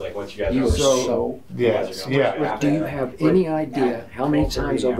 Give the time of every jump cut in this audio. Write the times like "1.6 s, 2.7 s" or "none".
2.5 s